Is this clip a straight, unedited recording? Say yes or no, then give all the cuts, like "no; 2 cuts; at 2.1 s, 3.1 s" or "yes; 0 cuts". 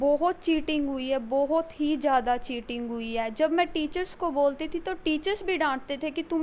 yes; 0 cuts